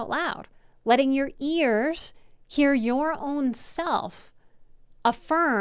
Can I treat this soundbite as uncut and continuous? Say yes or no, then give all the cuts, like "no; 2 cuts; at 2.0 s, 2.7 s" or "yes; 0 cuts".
yes; 0 cuts